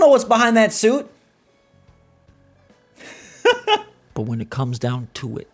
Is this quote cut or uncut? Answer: uncut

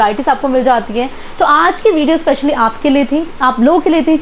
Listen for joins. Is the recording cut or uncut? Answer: uncut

